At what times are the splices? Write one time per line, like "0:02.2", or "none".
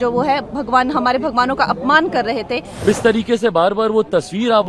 0:02.8

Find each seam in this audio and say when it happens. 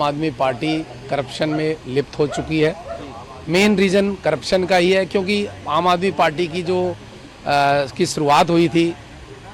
none

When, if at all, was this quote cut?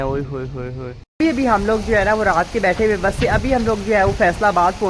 0:01.2

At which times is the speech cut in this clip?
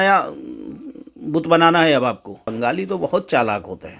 0:02.5

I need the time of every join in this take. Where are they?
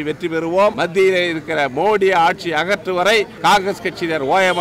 0:00.8
0:03.3

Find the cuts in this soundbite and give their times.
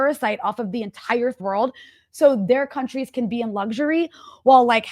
0:01.4

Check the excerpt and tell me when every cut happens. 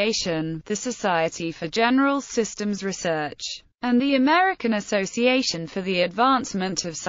0:03.0

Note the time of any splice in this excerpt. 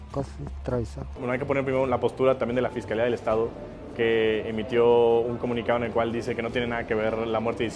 0:01.1

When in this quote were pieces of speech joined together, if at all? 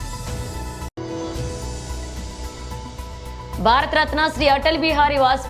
none

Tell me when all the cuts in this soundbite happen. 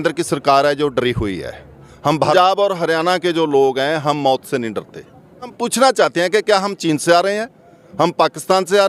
0:02.3
0:05.5

